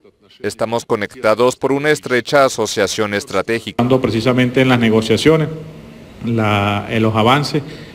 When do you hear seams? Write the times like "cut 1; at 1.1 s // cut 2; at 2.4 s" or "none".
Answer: cut 1; at 3.7 s